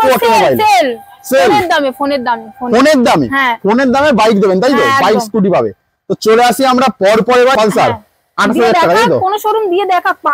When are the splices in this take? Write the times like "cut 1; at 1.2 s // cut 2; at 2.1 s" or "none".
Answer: cut 1; at 7.5 s